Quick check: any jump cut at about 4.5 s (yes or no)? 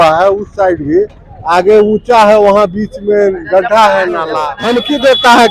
yes